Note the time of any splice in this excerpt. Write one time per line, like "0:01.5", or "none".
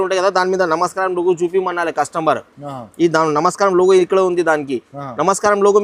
none